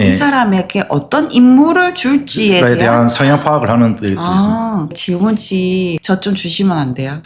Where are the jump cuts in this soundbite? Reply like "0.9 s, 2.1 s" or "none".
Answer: 6.0 s